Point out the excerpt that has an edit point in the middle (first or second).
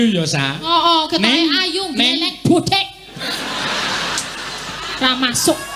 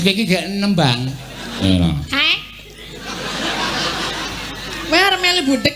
second